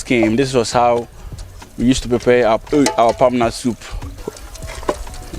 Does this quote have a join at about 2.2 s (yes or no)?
no